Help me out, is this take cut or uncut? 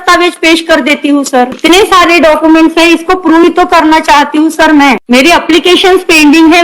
cut